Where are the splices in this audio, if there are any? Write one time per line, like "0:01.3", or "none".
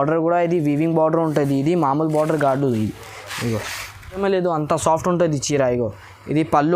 0:04.2